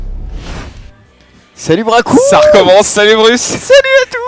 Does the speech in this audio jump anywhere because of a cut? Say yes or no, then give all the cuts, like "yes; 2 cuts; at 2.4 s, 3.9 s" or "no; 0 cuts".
no; 0 cuts